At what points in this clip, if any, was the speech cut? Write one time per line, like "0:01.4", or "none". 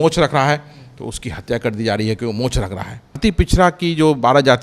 0:03.2